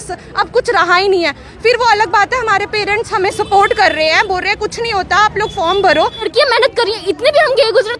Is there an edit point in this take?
yes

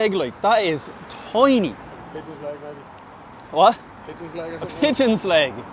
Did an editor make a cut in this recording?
no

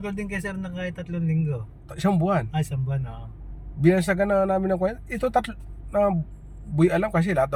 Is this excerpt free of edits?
yes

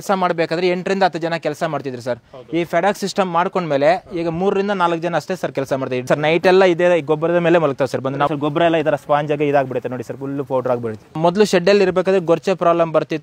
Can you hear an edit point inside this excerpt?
yes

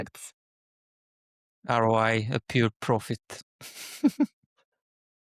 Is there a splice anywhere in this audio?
no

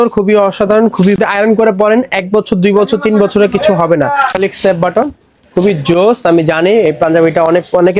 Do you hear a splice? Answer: yes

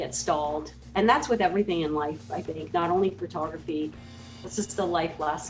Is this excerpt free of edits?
yes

